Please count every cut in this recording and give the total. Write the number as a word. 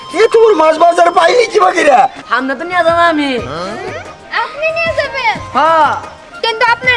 one